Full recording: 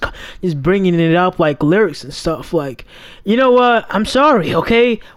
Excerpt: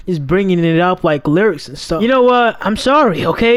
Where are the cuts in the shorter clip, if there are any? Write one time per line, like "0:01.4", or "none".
0:02.0